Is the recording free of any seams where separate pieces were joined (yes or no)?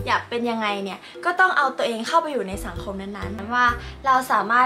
no